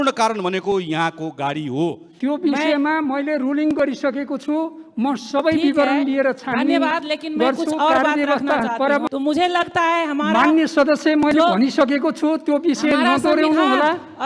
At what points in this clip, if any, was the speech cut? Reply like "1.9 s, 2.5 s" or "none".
2.1 s, 9.0 s

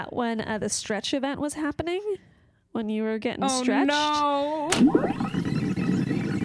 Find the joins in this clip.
4.7 s

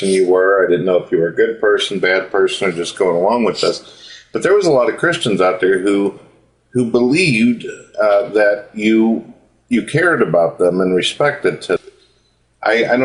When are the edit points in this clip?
none

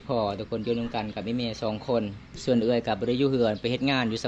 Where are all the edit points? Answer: 2.3 s

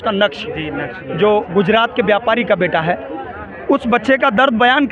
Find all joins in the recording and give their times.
none

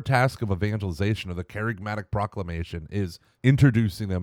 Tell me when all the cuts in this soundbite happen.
3.2 s

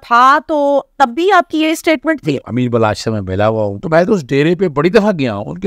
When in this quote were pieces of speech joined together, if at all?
2.4 s, 3.8 s

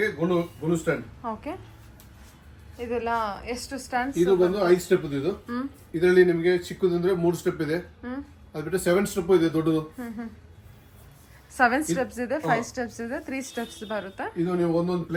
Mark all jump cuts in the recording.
none

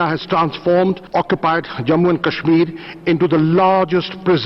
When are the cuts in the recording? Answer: 1.0 s

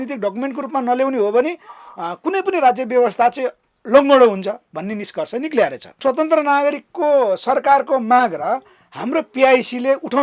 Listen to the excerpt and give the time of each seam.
6.0 s

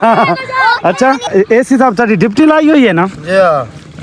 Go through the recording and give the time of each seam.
1.2 s

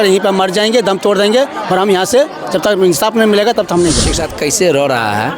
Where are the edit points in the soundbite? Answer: 4.2 s

